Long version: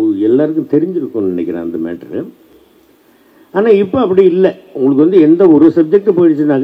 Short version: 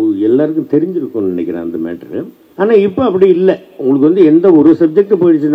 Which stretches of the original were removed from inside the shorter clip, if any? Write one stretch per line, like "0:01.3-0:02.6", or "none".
0:02.4-0:03.4